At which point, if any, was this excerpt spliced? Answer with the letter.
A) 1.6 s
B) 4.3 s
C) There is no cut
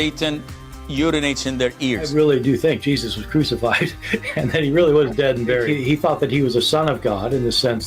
B